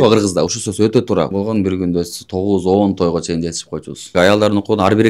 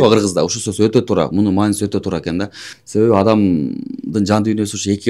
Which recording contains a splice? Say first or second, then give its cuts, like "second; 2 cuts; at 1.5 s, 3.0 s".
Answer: first; 2 cuts; at 1.3 s, 4.1 s